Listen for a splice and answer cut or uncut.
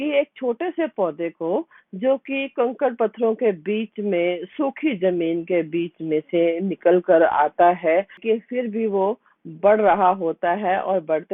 cut